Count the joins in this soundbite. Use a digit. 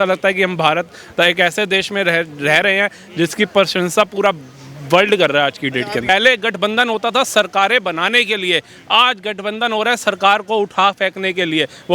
1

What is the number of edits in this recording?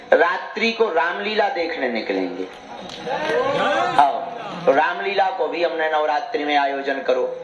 0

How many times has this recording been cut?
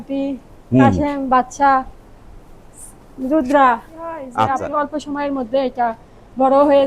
1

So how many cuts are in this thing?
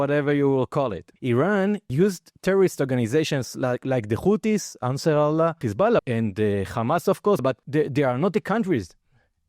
3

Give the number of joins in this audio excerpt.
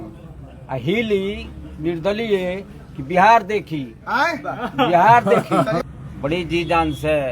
1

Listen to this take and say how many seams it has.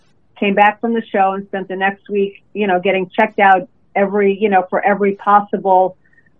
0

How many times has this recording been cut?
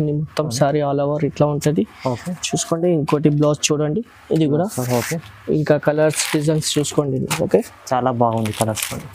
0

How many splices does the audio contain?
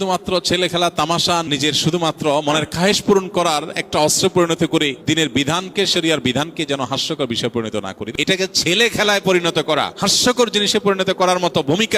4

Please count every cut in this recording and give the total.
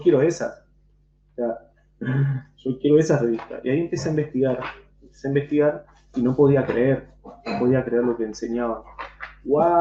0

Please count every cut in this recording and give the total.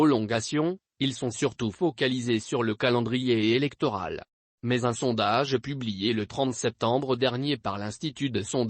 1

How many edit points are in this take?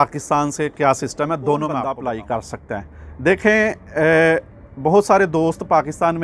1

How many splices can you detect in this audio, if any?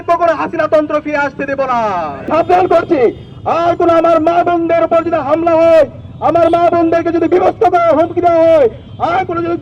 1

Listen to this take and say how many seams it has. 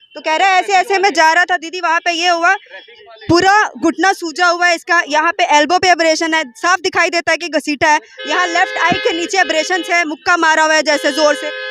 0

